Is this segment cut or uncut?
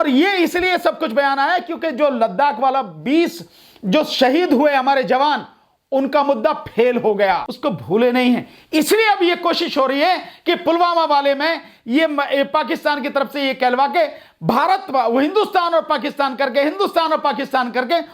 cut